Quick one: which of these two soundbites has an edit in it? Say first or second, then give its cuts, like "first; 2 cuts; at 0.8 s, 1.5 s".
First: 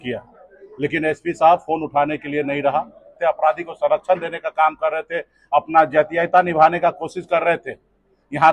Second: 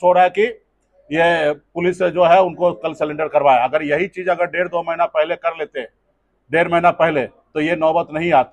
first; 1 cut; at 3.1 s